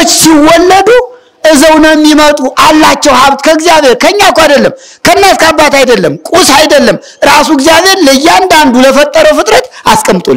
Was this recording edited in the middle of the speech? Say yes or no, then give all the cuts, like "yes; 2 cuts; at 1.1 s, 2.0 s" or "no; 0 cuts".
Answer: no; 0 cuts